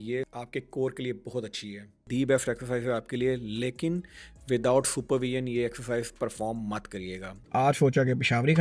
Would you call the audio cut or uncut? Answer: cut